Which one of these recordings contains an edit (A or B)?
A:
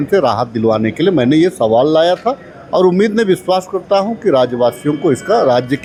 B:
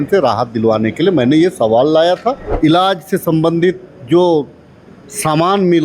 B